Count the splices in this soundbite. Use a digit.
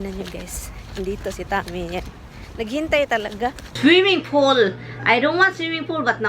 1